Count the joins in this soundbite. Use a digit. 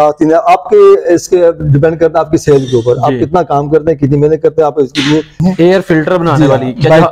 1